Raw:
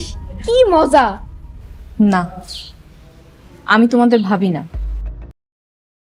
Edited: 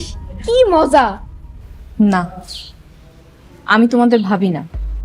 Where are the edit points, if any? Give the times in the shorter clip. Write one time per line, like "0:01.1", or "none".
none